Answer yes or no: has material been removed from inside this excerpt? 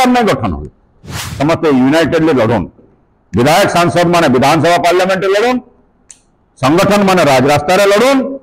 yes